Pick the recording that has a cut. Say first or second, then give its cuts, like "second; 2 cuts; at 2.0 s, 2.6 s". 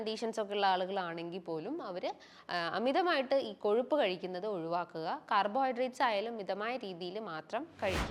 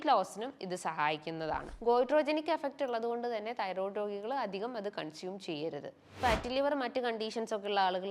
second; 2 cuts; at 1.7 s, 6.2 s